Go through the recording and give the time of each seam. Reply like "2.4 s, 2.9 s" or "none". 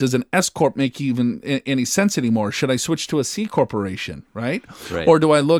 none